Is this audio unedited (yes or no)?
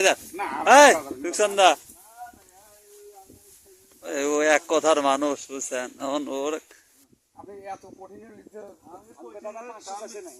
no